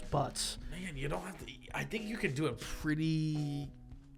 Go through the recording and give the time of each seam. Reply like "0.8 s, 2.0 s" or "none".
none